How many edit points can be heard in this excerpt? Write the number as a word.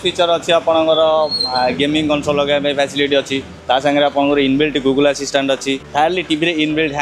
two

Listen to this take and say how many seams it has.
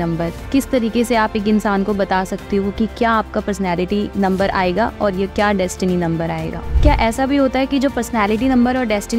one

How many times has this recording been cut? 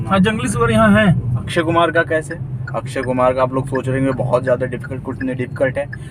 one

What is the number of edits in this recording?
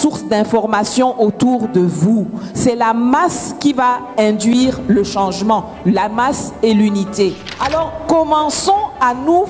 one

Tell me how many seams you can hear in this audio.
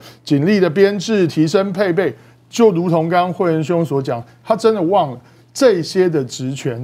zero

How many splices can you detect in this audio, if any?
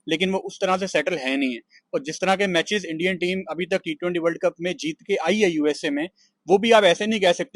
zero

